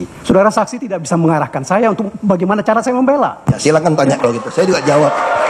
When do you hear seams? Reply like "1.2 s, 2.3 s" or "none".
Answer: none